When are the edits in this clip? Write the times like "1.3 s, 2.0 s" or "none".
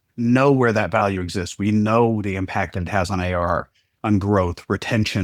none